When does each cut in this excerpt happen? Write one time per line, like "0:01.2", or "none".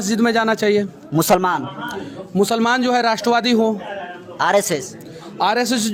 none